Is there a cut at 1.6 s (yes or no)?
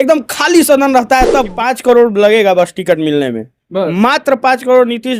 yes